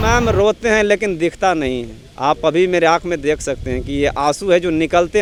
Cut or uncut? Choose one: uncut